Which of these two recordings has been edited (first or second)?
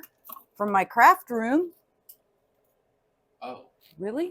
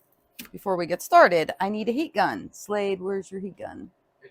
first